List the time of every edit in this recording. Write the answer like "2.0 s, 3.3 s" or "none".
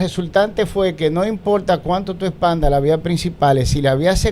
none